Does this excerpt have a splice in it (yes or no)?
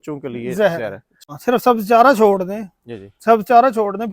yes